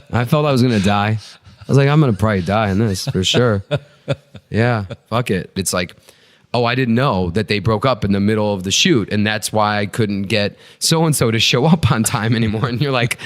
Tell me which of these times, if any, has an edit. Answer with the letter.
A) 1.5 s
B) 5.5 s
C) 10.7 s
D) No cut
B